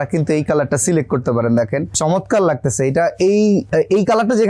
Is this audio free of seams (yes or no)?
yes